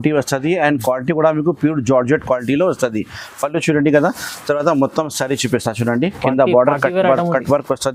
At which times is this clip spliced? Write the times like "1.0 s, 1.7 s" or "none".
none